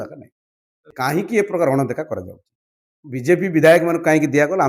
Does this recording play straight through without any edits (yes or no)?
no